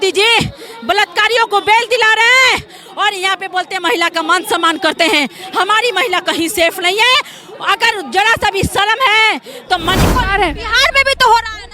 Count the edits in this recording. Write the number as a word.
one